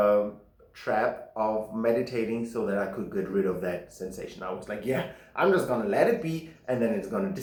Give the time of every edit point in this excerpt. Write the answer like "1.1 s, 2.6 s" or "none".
none